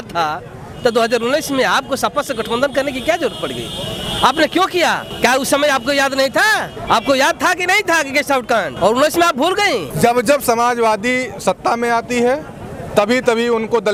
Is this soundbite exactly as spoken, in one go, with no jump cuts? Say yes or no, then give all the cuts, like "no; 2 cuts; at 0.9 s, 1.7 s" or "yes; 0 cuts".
yes; 0 cuts